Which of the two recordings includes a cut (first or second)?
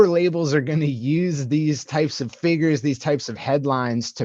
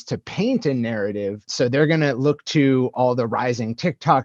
second